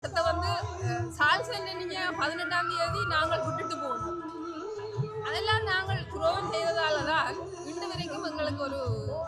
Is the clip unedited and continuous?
yes; 0 cuts

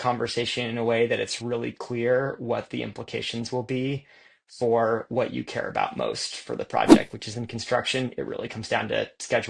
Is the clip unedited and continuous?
yes; 0 cuts

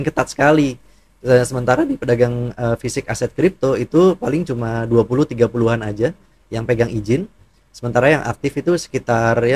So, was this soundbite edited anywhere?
no; 0 cuts

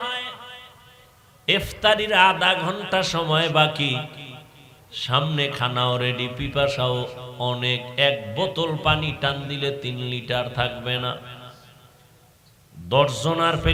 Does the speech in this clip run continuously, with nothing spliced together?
yes; 0 cuts

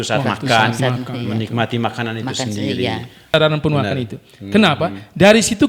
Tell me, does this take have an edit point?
yes; 1 cut; at 3.3 s

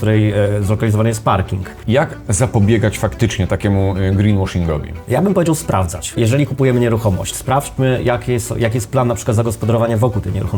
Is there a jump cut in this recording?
yes; 3 cuts; at 1.7 s, 4.9 s, 6.2 s

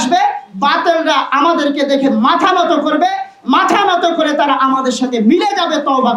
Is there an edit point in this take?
no; 0 cuts

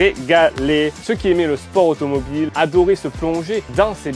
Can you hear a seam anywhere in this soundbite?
yes; 2 cuts; at 1.0 s, 2.5 s

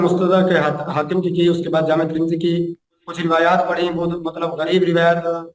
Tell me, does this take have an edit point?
no; 0 cuts

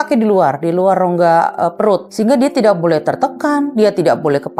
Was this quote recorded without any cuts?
no; 1 cut; at 2.1 s

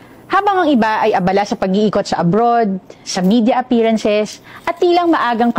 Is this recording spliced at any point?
no; 0 cuts

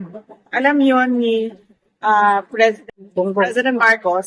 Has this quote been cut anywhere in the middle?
yes; 1 cut; at 2.8 s

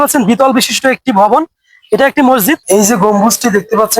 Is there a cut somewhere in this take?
yes; 1 cut; at 2.6 s

